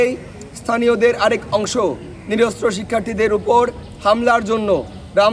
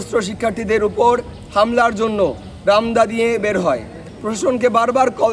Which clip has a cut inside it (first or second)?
second